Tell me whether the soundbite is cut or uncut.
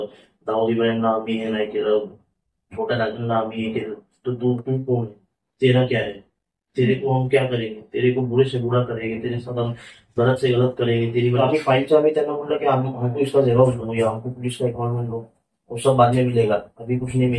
cut